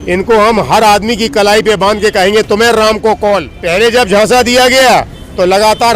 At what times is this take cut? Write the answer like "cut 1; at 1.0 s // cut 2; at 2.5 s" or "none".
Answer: cut 1; at 3.6 s